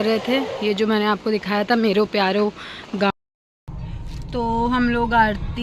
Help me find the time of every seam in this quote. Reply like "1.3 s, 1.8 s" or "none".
3.1 s